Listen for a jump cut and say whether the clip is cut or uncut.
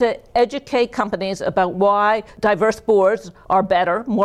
uncut